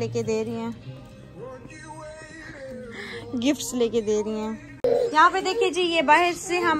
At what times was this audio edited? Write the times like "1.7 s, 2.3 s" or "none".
none